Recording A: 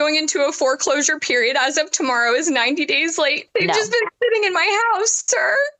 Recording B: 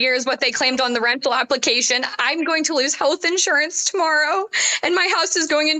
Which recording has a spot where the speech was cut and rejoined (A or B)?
A